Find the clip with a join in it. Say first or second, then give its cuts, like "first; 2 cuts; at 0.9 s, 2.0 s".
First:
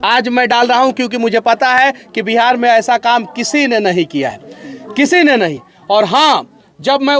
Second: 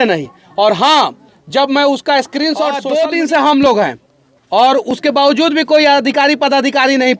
second; 1 cut; at 2.8 s